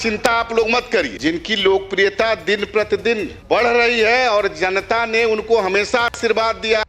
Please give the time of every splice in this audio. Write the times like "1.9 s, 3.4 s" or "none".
1.1 s, 3.3 s